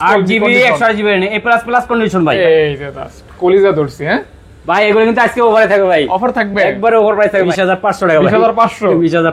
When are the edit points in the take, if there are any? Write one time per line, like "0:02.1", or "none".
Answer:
0:02.4
0:07.5